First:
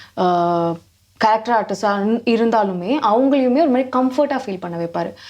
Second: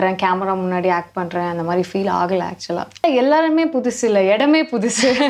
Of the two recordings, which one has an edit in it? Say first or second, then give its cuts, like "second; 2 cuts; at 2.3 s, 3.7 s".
second; 1 cut; at 3.0 s